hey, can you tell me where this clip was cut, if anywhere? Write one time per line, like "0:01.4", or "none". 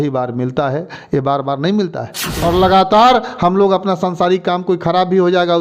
0:02.3